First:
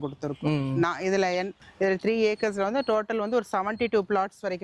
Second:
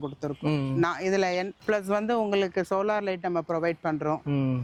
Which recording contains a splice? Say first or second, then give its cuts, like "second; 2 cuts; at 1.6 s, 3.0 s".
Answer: first; 1 cut; at 1.6 s